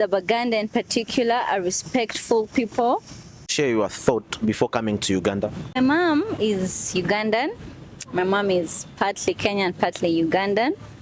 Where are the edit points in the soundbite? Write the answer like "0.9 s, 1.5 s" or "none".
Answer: 3.5 s, 5.8 s

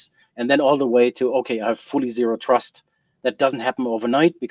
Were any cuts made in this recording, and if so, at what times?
none

